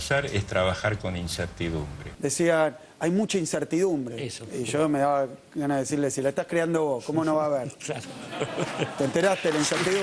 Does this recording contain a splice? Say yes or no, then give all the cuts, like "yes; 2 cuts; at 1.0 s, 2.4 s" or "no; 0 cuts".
yes; 2 cuts; at 2.0 s, 4.3 s